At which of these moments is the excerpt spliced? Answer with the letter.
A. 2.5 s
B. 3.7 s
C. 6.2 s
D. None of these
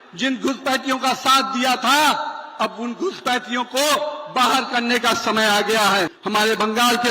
C